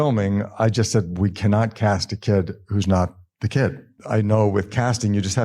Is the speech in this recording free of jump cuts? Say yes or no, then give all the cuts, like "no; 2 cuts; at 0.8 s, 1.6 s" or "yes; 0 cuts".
no; 1 cut; at 3.9 s